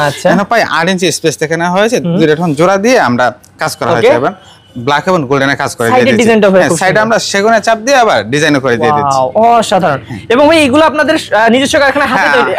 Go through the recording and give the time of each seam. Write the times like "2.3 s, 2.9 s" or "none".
none